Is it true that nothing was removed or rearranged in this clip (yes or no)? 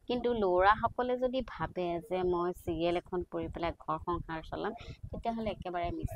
yes